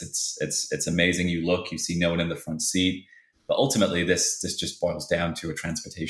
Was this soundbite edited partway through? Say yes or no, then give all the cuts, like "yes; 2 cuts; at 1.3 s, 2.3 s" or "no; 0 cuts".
yes; 1 cut; at 3.3 s